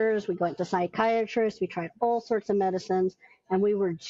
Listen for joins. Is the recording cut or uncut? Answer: uncut